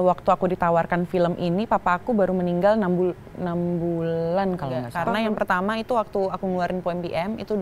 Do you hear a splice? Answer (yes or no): yes